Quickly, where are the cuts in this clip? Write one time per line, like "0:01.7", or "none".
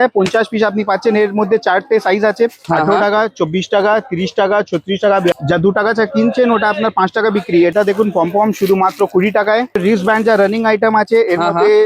0:02.6
0:05.3
0:07.7
0:09.8